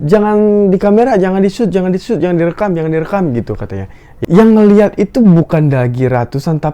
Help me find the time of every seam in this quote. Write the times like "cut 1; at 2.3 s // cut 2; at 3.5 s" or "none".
cut 1; at 4.1 s